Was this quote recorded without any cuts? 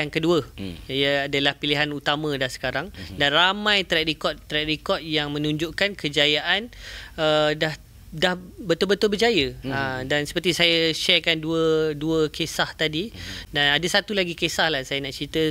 yes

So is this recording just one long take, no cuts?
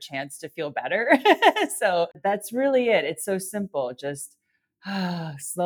no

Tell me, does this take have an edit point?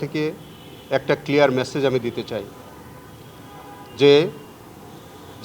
no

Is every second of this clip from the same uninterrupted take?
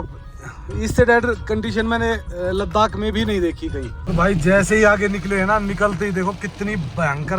no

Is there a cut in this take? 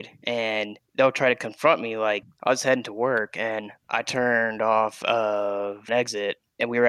no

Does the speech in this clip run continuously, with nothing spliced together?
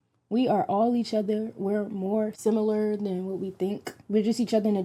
no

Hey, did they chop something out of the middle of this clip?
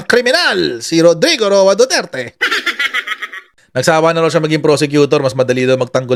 no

